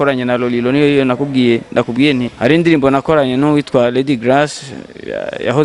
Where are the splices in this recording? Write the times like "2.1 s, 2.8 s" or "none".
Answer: 2.3 s